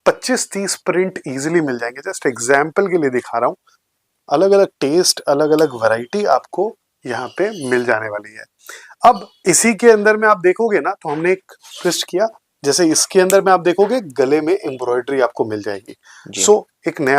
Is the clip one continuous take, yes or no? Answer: yes